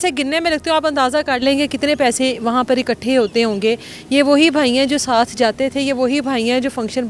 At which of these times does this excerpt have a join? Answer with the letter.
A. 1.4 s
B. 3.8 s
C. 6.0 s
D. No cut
D